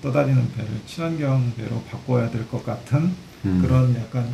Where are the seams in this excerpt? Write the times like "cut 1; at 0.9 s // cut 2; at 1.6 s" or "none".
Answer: none

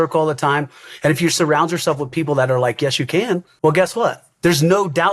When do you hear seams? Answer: cut 1; at 3.5 s // cut 2; at 4.3 s

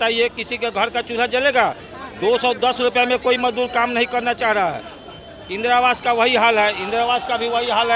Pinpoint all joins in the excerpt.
none

